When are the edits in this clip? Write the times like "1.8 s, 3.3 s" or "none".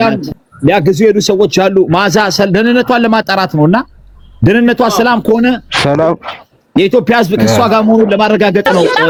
none